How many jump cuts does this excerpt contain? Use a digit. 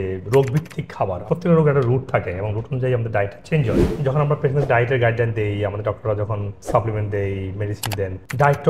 2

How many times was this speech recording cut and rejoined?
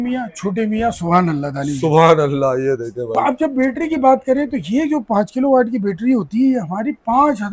1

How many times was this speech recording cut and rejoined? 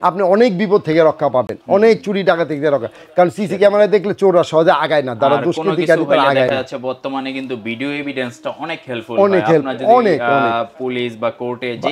0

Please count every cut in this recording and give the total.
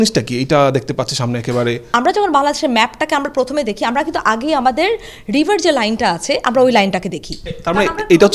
0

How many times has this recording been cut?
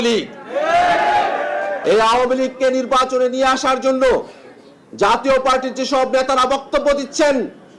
1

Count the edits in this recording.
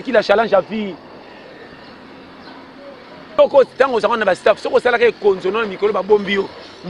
1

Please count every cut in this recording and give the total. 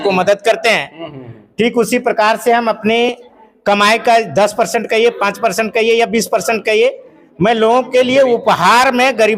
0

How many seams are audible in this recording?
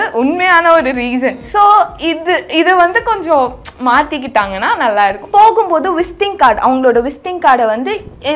2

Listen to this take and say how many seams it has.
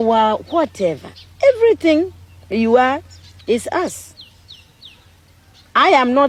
0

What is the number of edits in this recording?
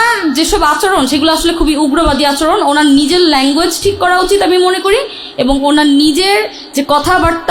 0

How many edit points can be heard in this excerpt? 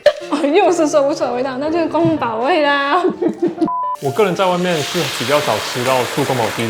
1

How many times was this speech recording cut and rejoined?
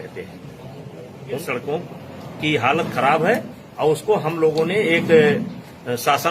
1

